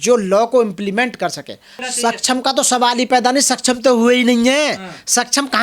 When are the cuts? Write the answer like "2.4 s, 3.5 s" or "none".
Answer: 1.8 s